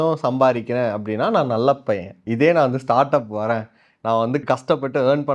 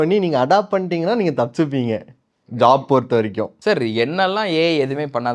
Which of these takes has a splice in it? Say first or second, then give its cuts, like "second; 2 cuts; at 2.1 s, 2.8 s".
second; 1 cut; at 3.5 s